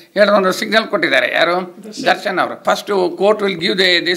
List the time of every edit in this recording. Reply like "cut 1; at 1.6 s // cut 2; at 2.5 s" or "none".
cut 1; at 2.6 s